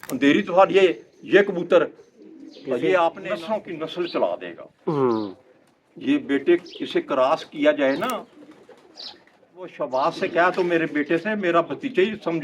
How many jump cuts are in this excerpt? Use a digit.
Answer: 2